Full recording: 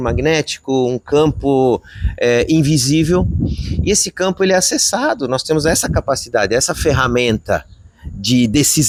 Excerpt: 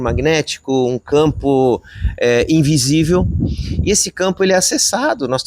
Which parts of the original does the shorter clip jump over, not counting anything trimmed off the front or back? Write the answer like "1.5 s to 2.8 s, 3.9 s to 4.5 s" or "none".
none